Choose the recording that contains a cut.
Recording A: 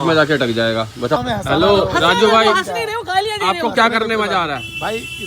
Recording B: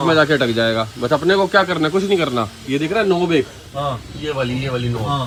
A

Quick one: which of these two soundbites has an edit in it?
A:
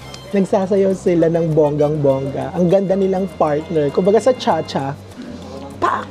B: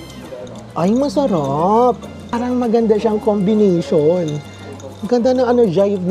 B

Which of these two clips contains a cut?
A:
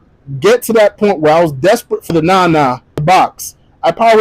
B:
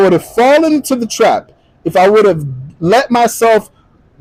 A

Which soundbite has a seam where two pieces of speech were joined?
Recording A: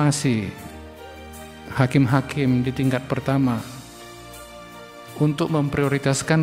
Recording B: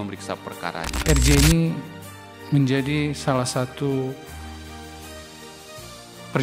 B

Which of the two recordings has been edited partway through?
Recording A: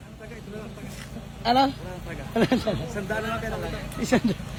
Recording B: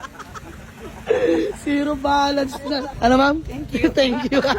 B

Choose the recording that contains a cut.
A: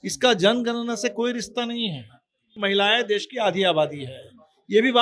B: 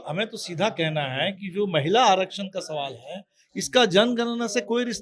A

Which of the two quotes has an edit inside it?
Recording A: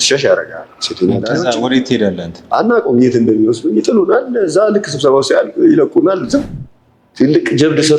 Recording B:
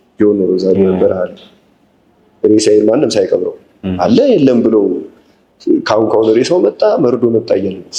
A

